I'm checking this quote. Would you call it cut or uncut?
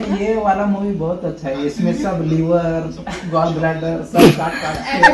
uncut